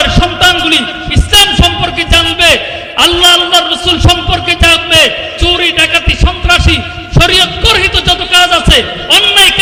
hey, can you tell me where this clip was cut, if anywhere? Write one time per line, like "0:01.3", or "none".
none